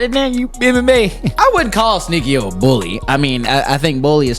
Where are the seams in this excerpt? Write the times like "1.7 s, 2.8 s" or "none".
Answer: 1.2 s, 2.9 s